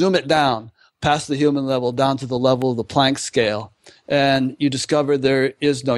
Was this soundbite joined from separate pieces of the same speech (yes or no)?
no